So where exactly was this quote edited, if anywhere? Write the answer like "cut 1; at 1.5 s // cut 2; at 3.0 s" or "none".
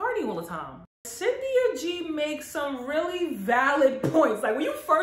cut 1; at 1.0 s